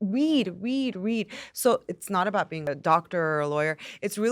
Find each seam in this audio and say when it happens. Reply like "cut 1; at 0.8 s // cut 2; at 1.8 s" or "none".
cut 1; at 2.6 s